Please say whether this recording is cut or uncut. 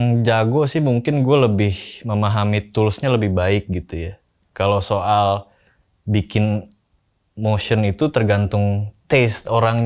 uncut